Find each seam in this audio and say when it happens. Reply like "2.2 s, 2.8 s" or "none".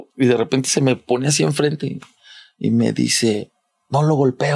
none

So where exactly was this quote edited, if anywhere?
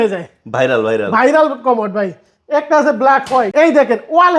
3.5 s

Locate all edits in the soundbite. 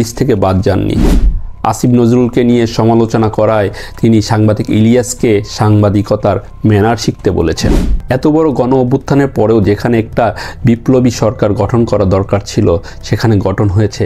7.9 s

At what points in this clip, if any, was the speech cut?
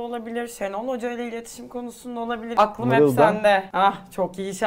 2.4 s, 3.7 s

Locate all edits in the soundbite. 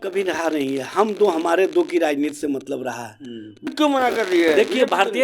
3.7 s

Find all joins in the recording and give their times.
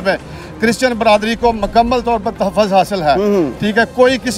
none

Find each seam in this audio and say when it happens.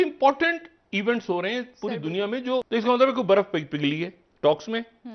2.7 s

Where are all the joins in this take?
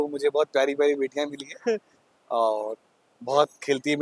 none

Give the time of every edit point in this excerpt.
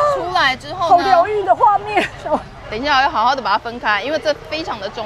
none

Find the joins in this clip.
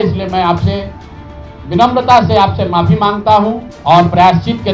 3.7 s

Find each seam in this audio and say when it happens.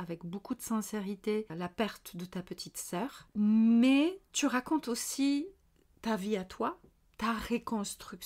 none

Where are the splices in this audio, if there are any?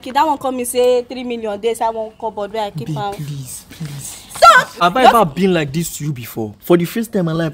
4.7 s

